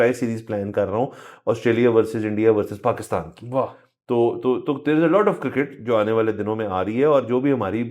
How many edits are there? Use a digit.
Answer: 0